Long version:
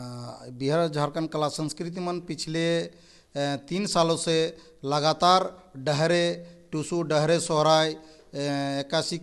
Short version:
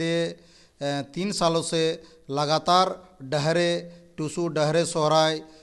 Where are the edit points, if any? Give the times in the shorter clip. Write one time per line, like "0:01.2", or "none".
none